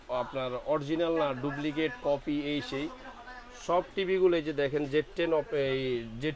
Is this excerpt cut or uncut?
uncut